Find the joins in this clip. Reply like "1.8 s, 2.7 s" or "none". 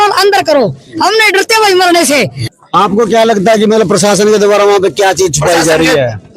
2.4 s